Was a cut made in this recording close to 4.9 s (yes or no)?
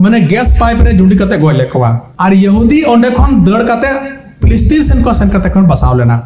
no